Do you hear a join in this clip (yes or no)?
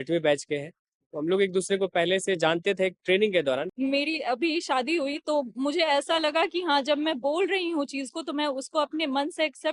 yes